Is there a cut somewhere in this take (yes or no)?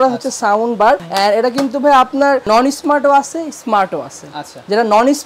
no